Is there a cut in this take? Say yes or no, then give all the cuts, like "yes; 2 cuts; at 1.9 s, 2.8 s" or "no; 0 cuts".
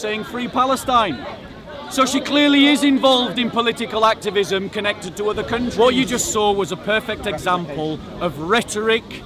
yes; 1 cut; at 5.7 s